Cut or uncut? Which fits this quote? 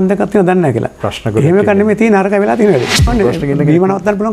cut